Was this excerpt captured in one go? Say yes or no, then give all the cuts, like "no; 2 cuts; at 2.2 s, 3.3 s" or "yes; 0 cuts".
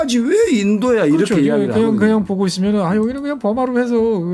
yes; 0 cuts